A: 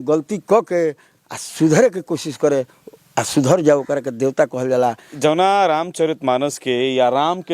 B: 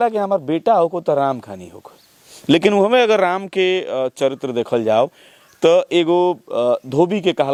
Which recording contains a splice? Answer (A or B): A